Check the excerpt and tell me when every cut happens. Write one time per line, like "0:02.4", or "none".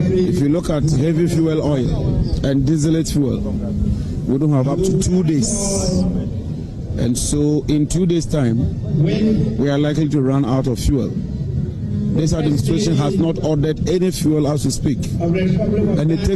none